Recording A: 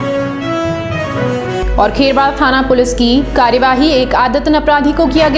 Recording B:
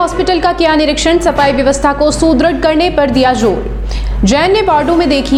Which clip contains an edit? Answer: A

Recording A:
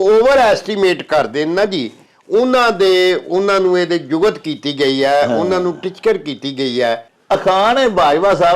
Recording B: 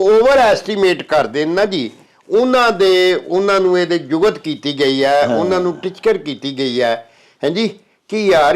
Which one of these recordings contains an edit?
A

